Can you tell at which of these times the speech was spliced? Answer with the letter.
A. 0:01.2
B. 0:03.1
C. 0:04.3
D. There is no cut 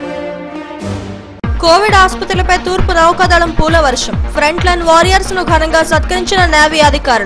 A